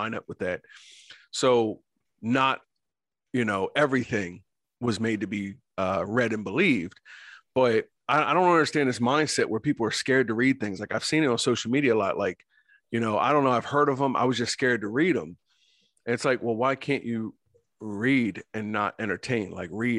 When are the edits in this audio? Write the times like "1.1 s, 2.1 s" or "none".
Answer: 8.0 s